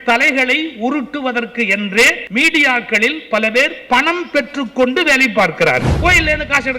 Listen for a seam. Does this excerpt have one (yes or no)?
yes